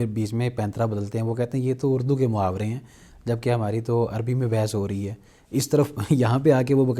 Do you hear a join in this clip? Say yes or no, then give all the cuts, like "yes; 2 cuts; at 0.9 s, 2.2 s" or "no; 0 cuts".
no; 0 cuts